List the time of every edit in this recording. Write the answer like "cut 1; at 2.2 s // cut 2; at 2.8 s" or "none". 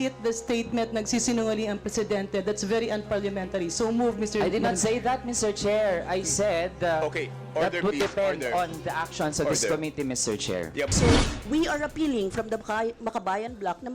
cut 1; at 10.9 s